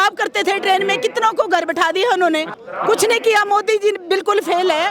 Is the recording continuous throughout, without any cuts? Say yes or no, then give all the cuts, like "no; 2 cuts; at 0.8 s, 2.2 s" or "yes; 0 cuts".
no; 1 cut; at 2.6 s